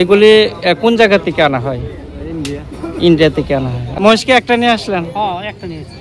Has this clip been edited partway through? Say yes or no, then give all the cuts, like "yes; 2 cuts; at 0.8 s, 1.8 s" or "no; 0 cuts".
yes; 1 cut; at 3.9 s